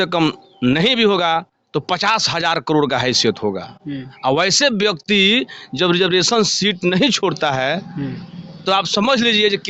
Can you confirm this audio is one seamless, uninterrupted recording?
yes; 0 cuts

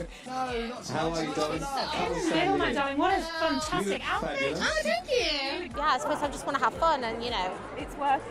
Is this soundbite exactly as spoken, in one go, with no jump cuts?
no; 1 cut; at 5.7 s

